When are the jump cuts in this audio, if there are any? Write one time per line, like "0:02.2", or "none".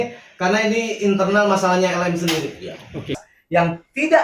0:03.1